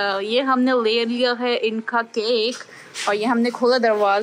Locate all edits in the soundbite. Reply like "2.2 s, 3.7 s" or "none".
none